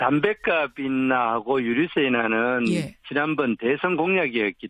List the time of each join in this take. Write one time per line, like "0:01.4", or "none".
0:03.2

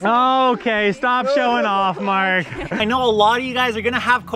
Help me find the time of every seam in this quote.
0:02.8

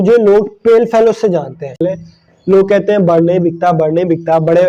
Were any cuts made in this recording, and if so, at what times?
0:01.8

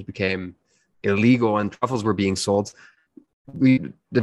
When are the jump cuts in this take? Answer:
none

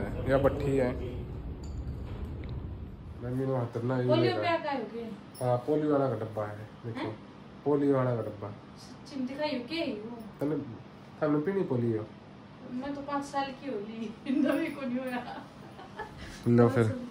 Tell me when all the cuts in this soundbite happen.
0:03.0

